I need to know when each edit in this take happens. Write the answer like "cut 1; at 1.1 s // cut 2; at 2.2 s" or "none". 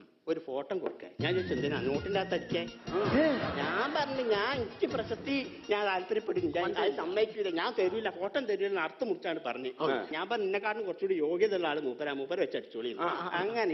none